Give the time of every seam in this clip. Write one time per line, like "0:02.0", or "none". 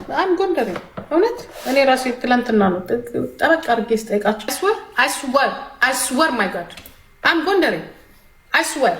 0:04.5